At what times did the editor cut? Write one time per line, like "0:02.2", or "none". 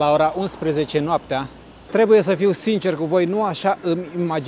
0:01.8

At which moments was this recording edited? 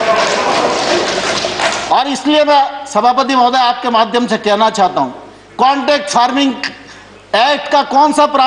none

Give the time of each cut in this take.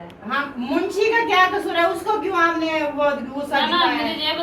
none

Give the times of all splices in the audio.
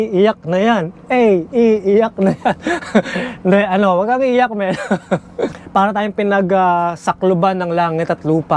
0:05.6

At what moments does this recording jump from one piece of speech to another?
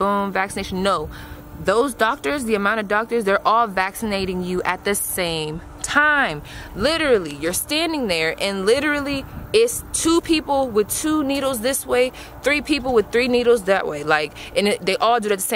none

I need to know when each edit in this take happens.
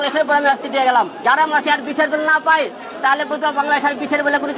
0:01.1

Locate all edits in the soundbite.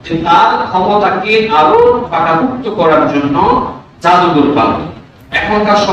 none

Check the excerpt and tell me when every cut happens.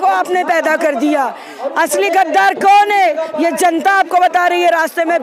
none

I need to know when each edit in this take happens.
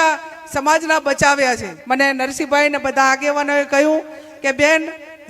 0:01.7

